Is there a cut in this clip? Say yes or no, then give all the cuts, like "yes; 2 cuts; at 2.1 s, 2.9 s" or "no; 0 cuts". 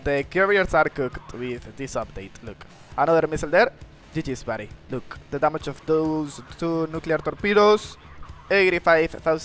yes; 1 cut; at 4.7 s